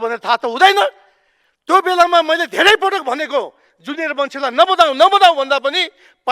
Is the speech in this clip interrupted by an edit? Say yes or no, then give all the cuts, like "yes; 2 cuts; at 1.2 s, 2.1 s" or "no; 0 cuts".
no; 0 cuts